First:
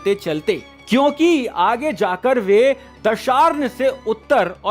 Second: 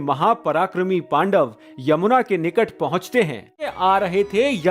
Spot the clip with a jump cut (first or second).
second